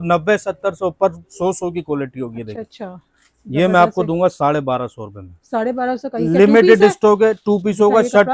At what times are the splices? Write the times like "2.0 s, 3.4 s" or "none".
none